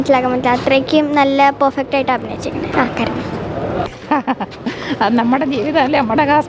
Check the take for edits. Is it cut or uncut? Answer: cut